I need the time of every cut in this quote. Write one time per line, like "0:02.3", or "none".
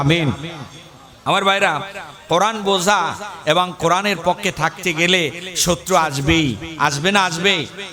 none

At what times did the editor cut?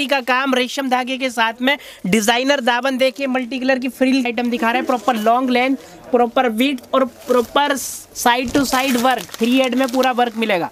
0:04.2

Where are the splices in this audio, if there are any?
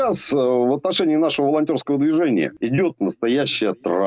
0:02.5

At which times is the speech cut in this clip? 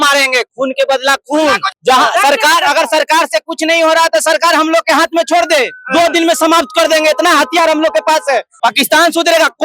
0:01.8
0:08.5

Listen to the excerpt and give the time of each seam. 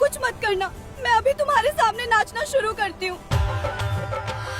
0:03.3

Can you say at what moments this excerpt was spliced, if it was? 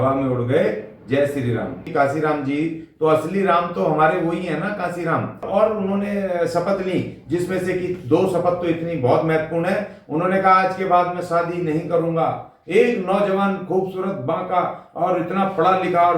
0:01.9
0:05.5

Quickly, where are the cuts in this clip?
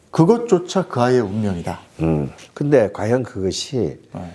none

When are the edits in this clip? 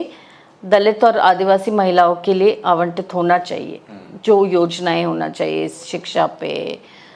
none

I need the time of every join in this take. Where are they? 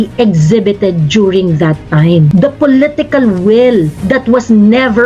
0:02.3
0:04.0

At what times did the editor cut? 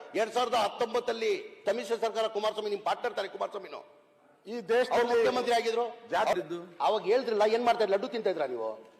0:01.5
0:06.3

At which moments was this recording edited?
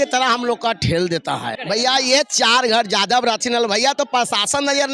0:01.6

